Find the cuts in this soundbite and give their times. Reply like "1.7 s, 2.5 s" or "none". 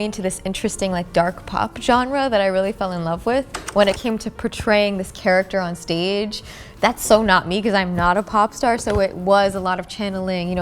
none